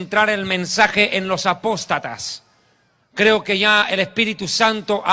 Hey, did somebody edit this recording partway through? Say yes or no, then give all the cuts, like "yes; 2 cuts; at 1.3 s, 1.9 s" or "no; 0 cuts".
no; 0 cuts